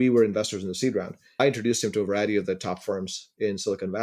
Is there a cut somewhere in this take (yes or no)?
yes